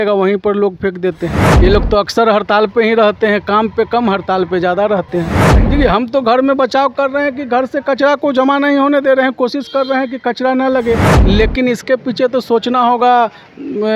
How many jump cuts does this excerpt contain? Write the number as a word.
three